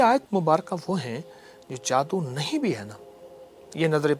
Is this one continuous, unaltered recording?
yes; 0 cuts

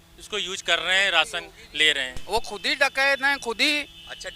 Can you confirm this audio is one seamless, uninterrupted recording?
no; 1 cut; at 2.1 s

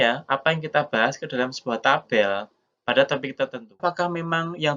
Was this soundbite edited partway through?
yes; 1 cut; at 3.8 s

